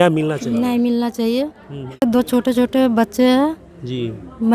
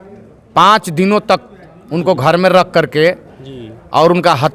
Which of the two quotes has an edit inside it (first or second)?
first